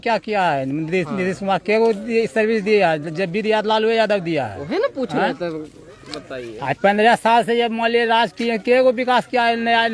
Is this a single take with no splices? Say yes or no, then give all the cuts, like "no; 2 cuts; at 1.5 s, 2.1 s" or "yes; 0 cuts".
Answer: yes; 0 cuts